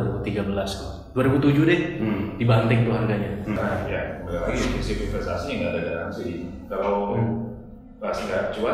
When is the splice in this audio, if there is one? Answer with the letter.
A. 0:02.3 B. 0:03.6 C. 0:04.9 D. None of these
B